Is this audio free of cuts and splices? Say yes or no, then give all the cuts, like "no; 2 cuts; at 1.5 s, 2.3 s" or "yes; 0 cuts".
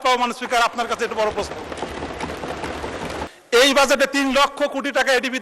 no; 1 cut; at 3.3 s